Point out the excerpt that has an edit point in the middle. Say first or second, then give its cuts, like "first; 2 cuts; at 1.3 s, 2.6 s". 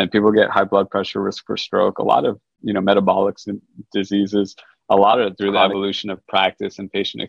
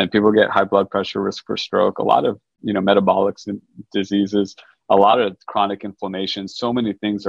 first; 1 cut; at 5.4 s